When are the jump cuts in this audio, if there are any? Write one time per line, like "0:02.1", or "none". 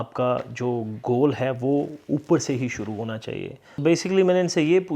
0:03.8

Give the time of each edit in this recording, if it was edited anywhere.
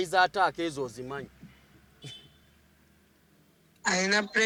none

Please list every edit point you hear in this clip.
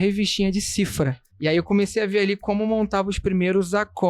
0:01.2

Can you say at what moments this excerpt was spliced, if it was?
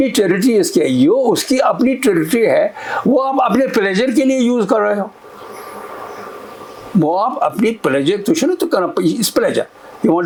none

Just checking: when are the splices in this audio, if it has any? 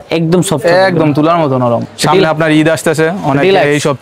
0:01.9

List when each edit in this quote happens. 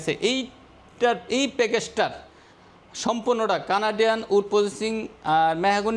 none

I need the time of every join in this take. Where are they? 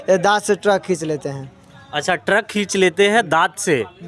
none

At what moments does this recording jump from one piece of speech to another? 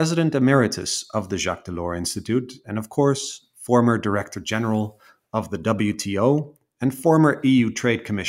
none

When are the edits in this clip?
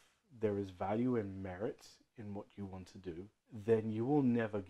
0:03.4

